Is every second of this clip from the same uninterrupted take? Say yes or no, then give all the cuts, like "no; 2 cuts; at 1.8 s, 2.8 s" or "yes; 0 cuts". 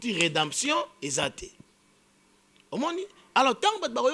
yes; 0 cuts